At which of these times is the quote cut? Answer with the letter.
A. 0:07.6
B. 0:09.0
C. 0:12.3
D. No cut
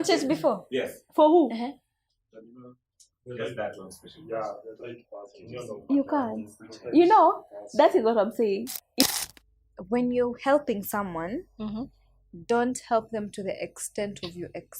B